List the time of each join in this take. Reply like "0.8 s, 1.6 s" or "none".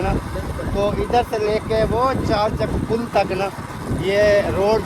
none